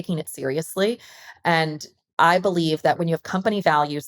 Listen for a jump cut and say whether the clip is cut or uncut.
cut